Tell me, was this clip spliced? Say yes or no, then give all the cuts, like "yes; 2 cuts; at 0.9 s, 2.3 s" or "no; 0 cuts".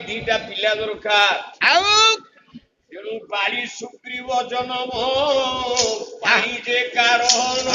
no; 0 cuts